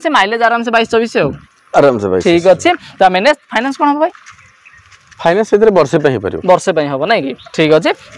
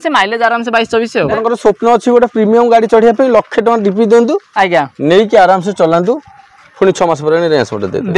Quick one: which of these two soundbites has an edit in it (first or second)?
second